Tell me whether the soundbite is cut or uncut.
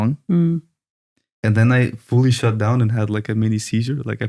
cut